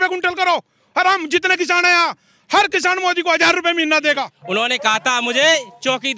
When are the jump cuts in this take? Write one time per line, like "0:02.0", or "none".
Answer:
0:04.4